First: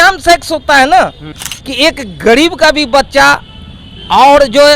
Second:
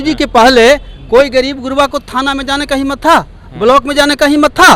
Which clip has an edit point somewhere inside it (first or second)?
first